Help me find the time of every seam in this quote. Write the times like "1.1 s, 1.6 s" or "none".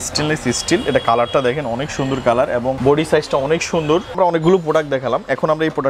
2.8 s, 4.1 s